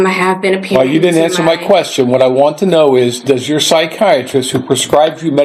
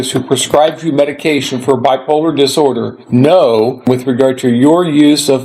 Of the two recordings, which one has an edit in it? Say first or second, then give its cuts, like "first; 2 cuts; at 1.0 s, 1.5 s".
second; 2 cuts; at 2.9 s, 3.9 s